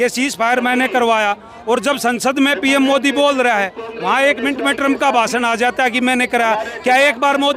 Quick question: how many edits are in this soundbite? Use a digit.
0